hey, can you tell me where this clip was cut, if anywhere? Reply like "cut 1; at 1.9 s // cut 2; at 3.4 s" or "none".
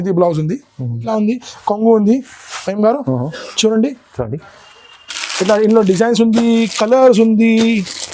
cut 1; at 1.1 s